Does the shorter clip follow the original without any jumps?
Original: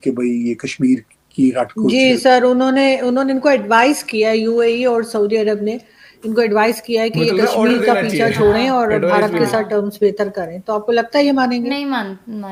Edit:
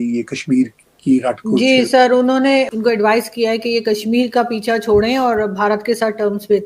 no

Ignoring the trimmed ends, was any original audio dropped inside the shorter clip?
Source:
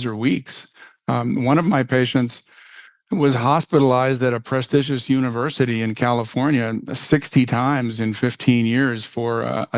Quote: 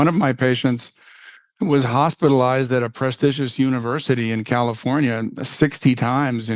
no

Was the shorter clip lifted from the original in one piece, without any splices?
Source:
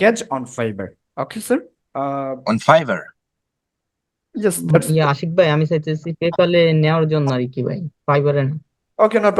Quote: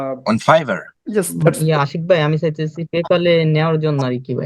no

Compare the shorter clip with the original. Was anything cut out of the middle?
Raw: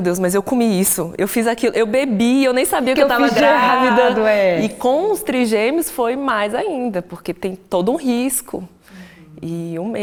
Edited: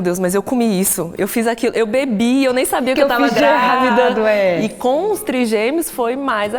no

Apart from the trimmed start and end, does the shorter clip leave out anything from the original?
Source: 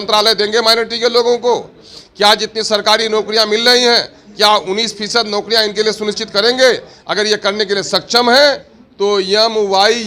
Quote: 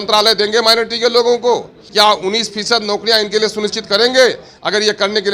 yes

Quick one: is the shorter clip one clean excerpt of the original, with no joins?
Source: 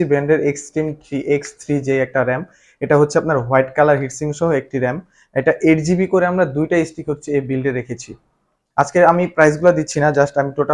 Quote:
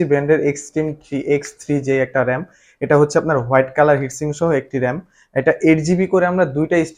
yes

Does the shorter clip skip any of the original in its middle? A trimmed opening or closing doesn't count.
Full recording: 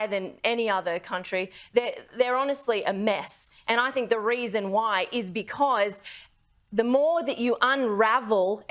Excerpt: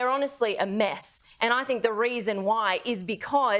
no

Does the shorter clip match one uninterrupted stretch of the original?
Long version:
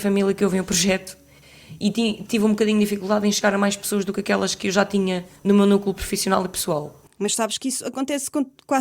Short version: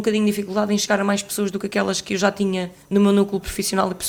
yes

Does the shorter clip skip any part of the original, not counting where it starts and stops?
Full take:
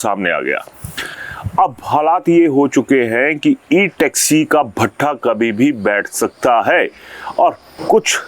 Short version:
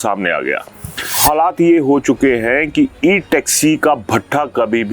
yes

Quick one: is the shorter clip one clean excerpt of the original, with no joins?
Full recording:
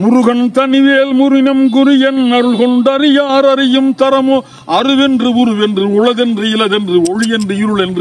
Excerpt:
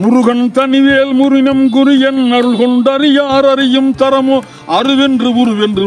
yes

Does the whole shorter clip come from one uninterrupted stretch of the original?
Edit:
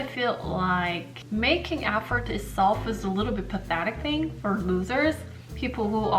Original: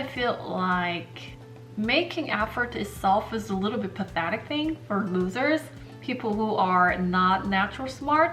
no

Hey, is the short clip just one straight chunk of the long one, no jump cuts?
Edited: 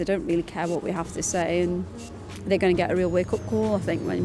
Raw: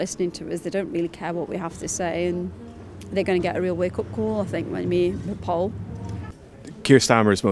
yes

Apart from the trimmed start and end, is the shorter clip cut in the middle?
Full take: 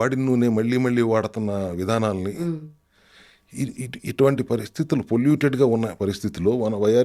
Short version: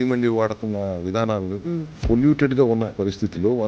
yes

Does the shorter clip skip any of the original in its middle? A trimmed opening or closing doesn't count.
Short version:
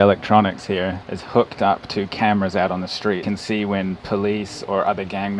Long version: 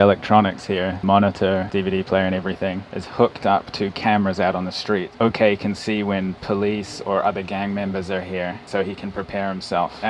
yes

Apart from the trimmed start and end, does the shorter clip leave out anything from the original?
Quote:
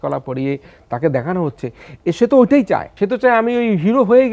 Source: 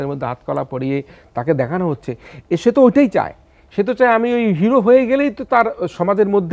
yes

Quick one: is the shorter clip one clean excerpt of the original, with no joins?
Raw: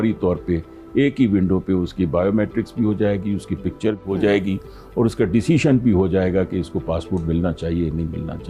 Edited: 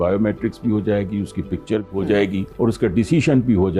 no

